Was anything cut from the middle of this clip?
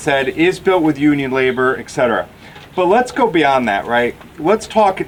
no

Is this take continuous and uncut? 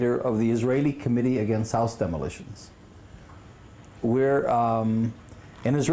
yes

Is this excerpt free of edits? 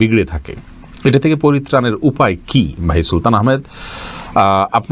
yes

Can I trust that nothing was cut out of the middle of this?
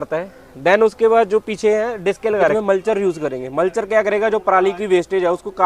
no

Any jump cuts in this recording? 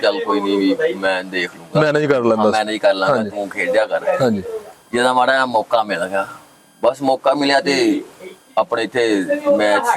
no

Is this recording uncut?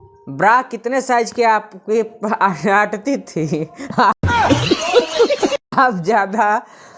no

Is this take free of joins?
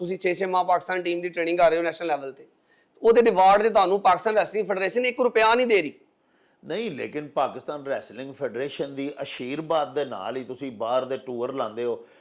yes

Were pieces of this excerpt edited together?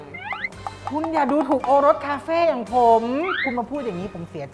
yes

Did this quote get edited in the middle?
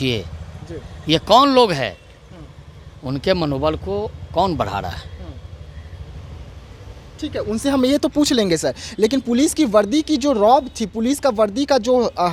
no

